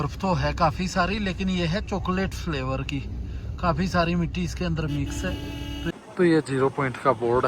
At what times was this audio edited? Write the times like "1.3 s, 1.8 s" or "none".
5.9 s